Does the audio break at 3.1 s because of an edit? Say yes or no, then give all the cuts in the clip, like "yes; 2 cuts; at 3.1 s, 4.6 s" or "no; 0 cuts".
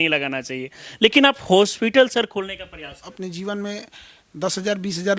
yes; 1 cut; at 3.1 s